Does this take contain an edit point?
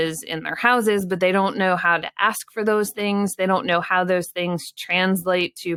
no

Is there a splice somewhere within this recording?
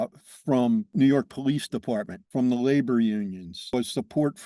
yes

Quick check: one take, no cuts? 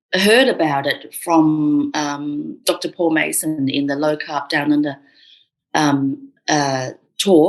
yes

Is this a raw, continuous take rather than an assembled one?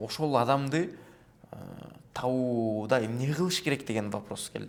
yes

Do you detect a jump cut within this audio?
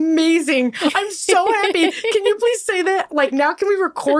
no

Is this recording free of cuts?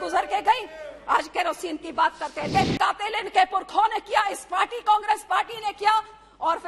no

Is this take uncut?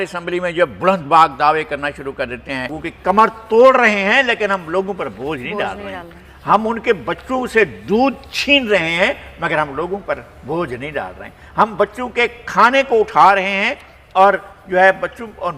no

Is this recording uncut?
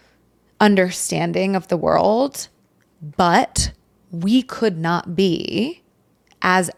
yes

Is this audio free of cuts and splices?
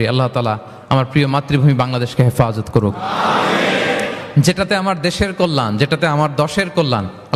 yes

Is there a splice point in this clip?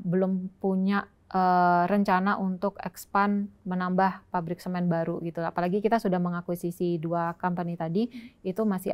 no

